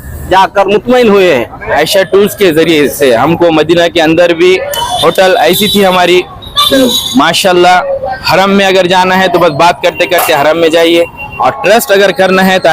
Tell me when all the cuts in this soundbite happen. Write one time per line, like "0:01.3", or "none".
0:01.8
0:11.2